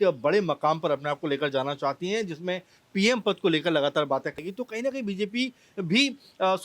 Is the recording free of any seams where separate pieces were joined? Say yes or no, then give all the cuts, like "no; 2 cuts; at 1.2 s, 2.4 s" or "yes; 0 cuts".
no; 1 cut; at 4.4 s